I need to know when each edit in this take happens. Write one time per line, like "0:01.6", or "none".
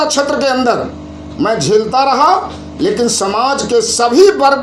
none